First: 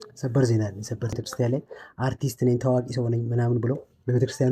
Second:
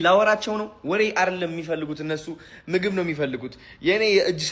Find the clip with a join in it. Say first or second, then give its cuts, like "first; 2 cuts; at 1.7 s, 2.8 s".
first; 1 cut; at 1.1 s